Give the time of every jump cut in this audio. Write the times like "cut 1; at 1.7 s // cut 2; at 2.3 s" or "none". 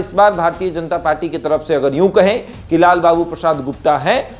none